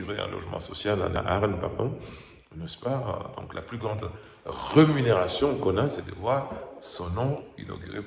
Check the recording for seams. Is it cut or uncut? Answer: cut